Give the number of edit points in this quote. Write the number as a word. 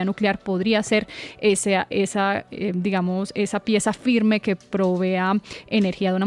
zero